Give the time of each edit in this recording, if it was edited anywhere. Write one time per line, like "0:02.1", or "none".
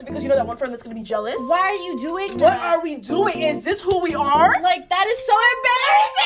none